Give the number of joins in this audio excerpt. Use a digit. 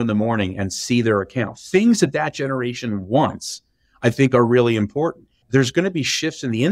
1